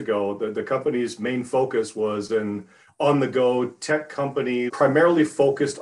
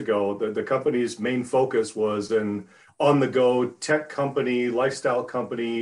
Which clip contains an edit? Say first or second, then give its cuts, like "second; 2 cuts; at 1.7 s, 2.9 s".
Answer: first; 1 cut; at 4.7 s